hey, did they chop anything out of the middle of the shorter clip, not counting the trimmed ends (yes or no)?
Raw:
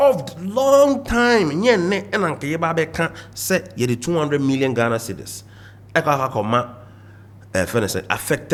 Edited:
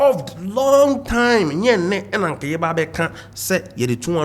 no